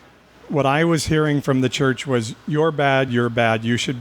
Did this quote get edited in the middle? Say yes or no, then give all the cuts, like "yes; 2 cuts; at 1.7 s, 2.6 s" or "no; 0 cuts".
no; 0 cuts